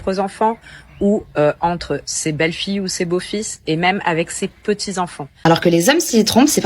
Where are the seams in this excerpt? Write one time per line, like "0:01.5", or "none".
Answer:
0:05.3